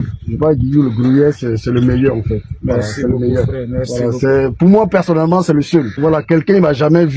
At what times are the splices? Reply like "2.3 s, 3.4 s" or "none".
6.0 s